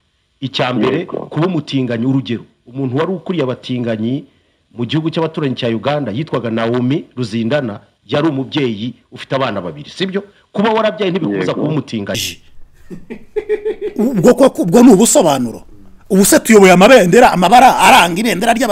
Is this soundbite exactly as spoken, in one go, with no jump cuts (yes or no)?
no